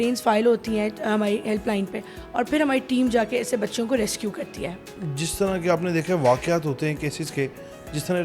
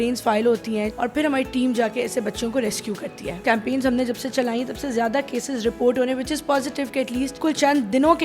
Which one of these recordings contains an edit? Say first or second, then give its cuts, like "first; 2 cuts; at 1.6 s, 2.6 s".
second; 3 cuts; at 0.9 s, 3.4 s, 7.4 s